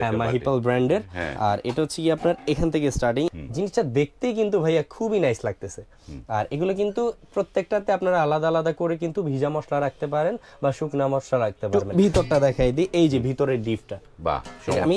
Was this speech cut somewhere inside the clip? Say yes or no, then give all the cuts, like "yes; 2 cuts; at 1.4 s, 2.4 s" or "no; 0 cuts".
yes; 2 cuts; at 3.3 s, 11.7 s